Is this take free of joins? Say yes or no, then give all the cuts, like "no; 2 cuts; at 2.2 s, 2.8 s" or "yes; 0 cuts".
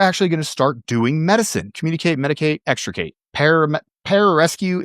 no; 2 cuts; at 1.8 s, 3.2 s